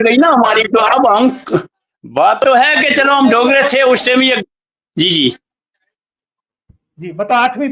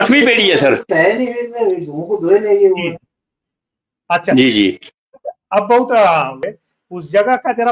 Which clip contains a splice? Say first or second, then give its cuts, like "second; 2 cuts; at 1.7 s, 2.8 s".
second; 1 cut; at 6.4 s